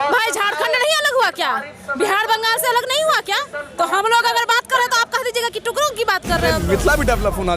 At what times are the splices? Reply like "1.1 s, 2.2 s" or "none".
6.6 s